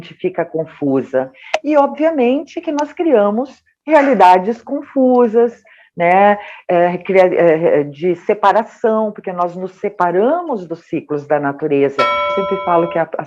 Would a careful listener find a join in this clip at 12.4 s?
yes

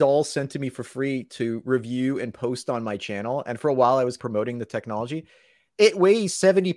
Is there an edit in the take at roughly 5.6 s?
yes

